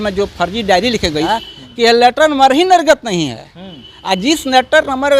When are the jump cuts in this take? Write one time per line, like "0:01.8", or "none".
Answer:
0:01.3